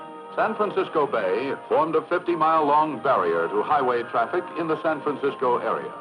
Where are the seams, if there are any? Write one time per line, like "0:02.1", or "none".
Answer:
0:01.2